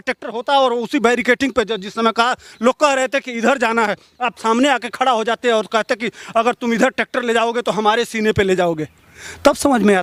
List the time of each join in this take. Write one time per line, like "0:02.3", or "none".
none